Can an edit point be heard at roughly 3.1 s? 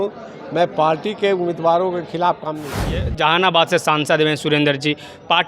yes; 1 cut; at 3.1 s

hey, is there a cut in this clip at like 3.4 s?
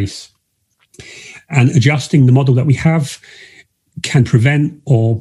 no; 0 cuts

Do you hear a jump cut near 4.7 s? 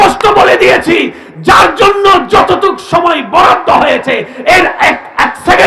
no; 0 cuts

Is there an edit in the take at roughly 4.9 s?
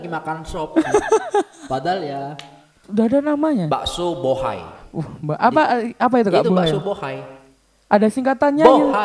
no; 1 cut; at 2.9 s

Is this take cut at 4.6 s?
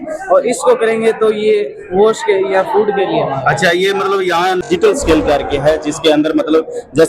yes; 1 cut; at 4.6 s

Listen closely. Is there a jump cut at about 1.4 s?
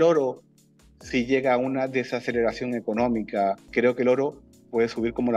no; 1 cut; at 3.6 s

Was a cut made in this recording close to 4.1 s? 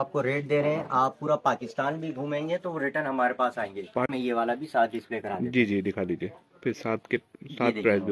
yes; 1 cut; at 4.1 s

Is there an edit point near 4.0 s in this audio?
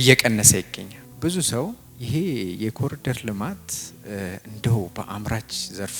no; 2 cuts; at 1.0 s, 1.9 s

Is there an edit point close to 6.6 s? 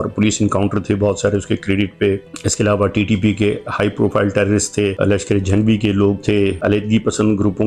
yes; 3 cuts; at 2.3 s, 4.9 s, 6.6 s

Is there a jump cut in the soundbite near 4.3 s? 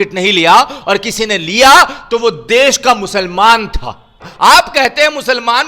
yes; 1 cut; at 4.3 s

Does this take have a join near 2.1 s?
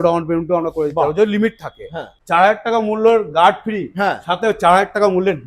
yes; 1 cut; at 2.1 s

